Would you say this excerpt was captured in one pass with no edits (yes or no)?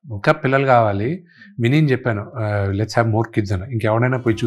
yes